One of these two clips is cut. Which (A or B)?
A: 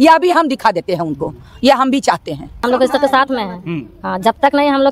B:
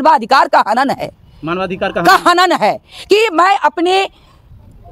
A